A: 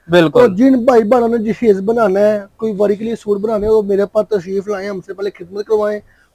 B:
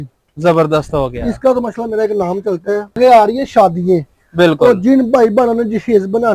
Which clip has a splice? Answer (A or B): B